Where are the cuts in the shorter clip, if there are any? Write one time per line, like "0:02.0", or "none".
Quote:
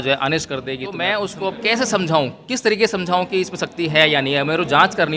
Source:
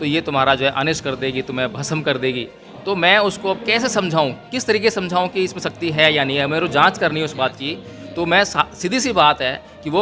0:00.9